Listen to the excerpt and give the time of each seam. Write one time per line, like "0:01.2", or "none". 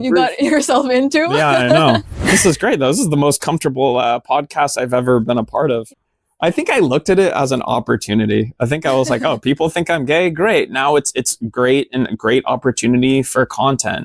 0:05.8